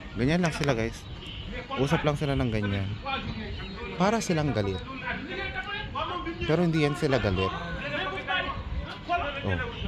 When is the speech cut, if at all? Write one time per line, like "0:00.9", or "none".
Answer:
none